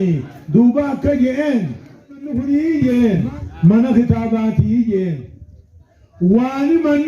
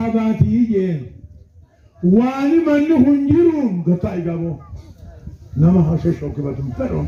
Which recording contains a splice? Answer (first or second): first